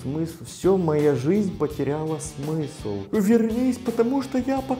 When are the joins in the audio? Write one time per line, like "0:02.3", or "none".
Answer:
0:03.1